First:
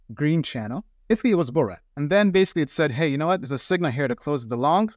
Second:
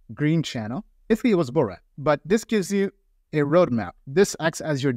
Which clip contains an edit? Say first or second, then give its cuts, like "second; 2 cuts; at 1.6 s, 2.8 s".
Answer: second; 1 cut; at 1.9 s